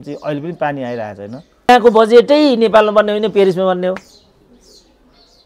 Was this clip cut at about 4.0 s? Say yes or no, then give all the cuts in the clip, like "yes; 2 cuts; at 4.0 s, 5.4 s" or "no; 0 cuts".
no; 1 cut; at 1.7 s